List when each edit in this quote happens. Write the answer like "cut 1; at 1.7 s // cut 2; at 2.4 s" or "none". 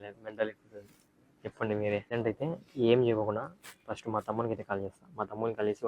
cut 1; at 2.1 s

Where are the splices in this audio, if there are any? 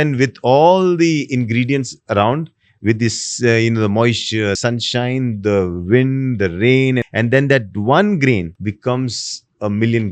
cut 1; at 4.6 s // cut 2; at 7.0 s // cut 3; at 8.5 s

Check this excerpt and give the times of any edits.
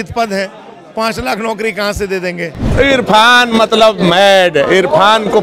cut 1; at 2.7 s

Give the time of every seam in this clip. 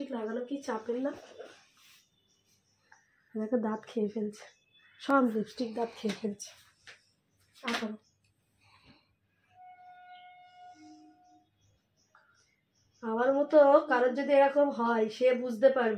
none

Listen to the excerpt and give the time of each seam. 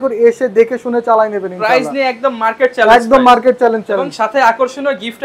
none

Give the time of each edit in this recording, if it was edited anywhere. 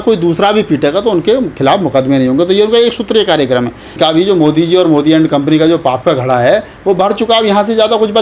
cut 1; at 3.8 s

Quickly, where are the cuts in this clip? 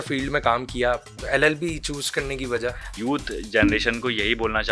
cut 1; at 1.1 s // cut 2; at 2.9 s

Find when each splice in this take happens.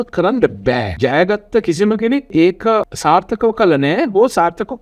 cut 1; at 0.9 s // cut 2; at 2.5 s

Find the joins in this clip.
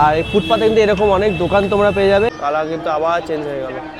cut 1; at 2.3 s

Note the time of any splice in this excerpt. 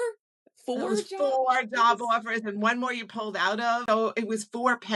cut 1; at 3.8 s

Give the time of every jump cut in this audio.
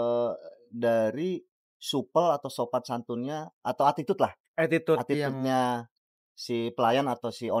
none

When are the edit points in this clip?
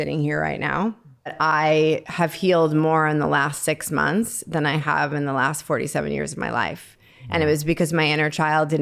cut 1; at 1.3 s // cut 2; at 2.1 s

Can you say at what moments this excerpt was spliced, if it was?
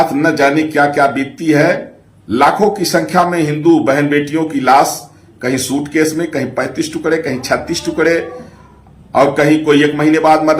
none

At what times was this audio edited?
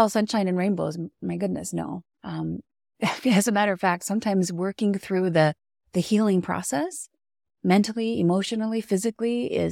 cut 1; at 1.1 s

